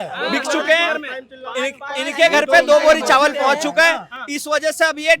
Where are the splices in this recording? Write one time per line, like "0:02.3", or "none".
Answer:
none